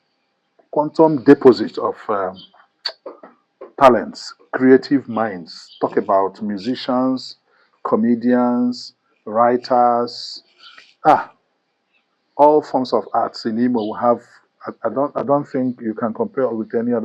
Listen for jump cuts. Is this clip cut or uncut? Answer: uncut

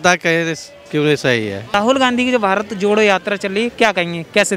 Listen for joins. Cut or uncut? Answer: cut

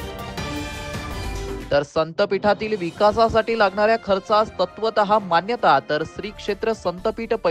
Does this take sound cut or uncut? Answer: cut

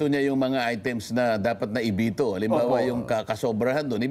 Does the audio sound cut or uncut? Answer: uncut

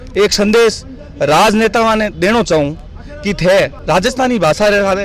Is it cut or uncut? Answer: cut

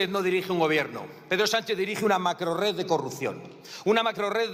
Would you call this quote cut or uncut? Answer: uncut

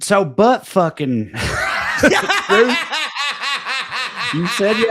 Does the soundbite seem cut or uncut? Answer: uncut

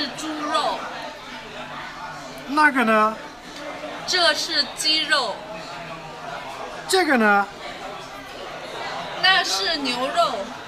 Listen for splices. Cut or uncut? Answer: cut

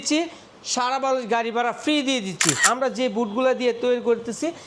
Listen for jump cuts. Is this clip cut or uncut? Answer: cut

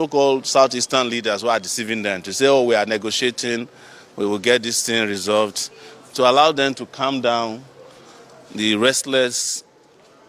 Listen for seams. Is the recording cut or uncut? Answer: uncut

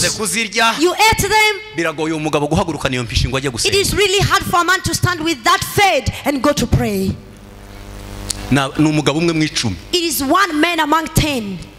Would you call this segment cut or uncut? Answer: uncut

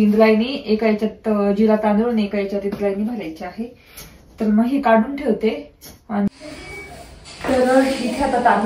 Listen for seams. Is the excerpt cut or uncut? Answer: cut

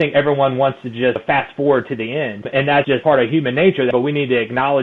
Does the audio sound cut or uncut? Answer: cut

